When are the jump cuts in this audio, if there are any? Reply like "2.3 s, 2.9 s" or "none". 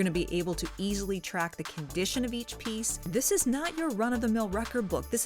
3.1 s